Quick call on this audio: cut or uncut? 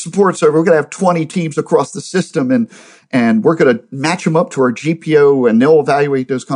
uncut